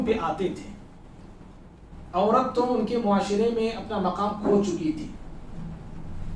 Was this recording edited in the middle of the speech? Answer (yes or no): no